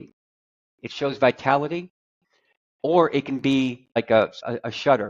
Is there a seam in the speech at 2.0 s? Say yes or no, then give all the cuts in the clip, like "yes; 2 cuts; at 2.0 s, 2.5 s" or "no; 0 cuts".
no; 1 cut; at 4.0 s